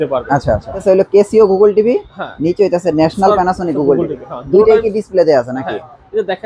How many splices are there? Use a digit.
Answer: 1